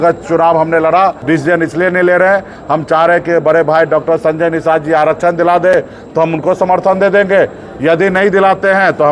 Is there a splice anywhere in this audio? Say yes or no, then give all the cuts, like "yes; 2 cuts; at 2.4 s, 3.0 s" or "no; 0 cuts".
yes; 1 cut; at 1.2 s